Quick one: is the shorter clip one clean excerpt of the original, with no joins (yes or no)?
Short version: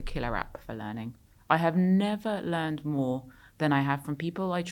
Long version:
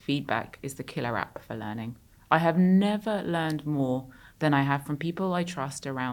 yes